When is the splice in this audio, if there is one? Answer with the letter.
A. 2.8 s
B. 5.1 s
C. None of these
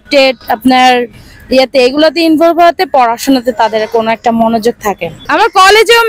C